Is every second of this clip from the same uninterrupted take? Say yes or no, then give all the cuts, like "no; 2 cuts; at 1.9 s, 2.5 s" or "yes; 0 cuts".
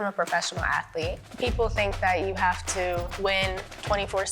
no; 2 cuts; at 1.2 s, 3.3 s